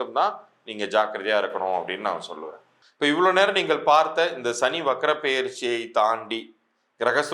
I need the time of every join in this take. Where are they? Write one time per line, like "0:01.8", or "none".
none